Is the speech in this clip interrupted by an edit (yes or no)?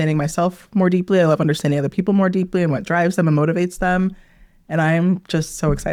no